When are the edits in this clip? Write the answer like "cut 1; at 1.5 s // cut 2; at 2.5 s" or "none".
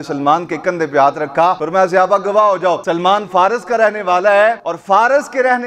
cut 1; at 1.6 s // cut 2; at 2.8 s // cut 3; at 4.7 s